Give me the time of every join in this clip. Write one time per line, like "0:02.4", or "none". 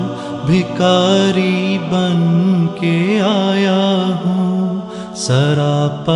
none